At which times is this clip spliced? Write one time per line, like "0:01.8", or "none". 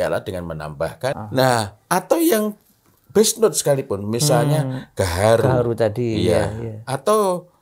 0:01.2

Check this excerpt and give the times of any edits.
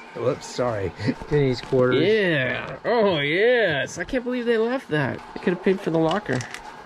0:01.2
0:05.3

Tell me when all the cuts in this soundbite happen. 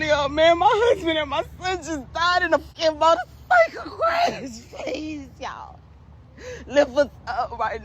0:02.7

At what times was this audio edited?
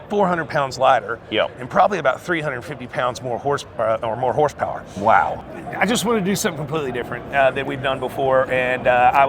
0:05.4

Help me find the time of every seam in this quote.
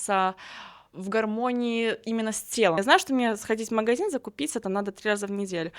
0:02.8

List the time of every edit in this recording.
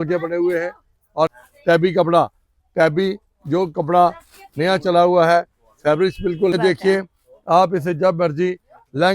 0:01.3
0:06.5

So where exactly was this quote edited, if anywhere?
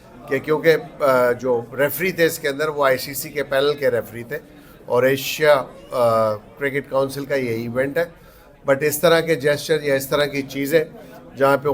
none

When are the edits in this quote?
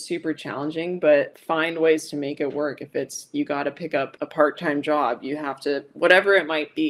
none

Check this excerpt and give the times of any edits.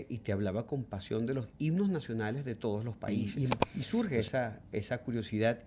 0:03.2

